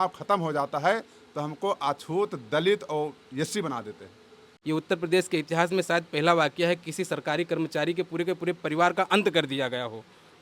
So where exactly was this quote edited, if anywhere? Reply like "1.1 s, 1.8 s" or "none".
4.5 s